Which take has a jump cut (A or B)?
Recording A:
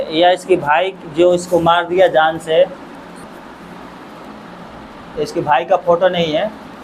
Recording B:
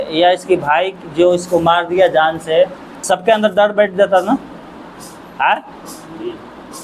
B